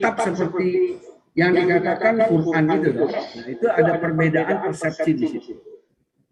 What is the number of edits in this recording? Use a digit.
0